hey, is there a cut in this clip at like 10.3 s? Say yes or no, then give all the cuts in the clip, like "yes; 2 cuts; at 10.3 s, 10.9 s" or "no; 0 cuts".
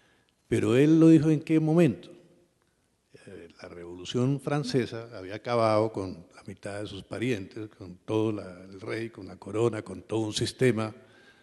no; 1 cut; at 5.4 s